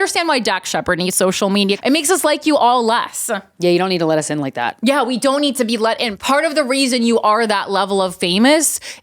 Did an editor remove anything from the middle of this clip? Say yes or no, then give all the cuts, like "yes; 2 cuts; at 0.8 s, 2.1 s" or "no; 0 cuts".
yes; 2 cuts; at 1.8 s, 6.1 s